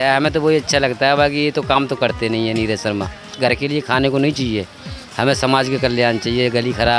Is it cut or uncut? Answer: cut